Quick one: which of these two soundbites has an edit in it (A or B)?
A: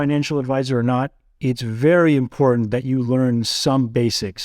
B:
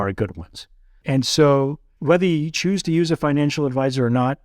B